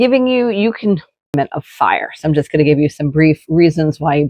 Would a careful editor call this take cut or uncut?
cut